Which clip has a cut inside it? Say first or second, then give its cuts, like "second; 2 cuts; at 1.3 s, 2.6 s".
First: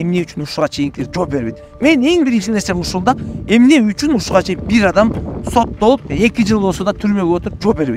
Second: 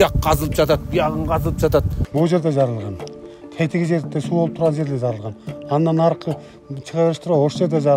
second; 1 cut; at 2.0 s